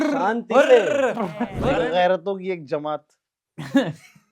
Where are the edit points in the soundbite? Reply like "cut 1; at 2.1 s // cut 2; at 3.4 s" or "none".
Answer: cut 1; at 1.6 s